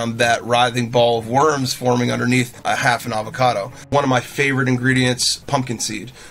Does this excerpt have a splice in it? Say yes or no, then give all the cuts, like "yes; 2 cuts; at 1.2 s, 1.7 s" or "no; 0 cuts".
yes; 3 cuts; at 2.6 s, 3.9 s, 5.4 s